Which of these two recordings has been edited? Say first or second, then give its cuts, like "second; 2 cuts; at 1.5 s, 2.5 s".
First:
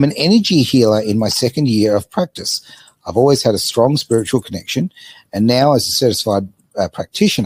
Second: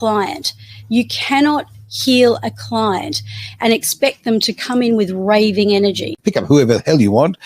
second; 1 cut; at 6.2 s